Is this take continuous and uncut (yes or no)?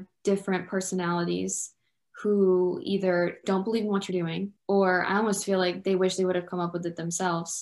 no